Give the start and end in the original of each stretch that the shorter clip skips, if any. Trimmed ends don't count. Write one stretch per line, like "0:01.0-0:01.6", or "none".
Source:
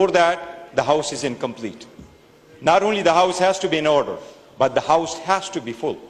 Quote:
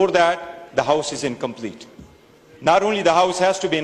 none